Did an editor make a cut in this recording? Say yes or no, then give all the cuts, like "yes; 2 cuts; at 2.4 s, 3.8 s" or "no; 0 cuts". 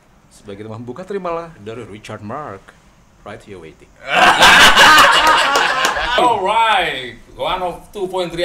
yes; 1 cut; at 6.2 s